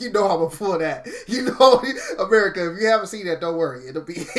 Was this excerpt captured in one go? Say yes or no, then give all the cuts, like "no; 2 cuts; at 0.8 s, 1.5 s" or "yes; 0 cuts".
yes; 0 cuts